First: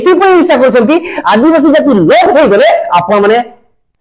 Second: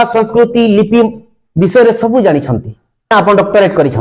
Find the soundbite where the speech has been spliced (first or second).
second